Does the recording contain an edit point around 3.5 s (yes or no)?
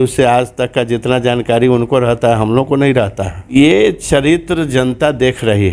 yes